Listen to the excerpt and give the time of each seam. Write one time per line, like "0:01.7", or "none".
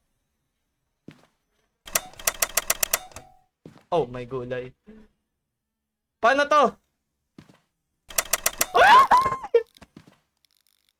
none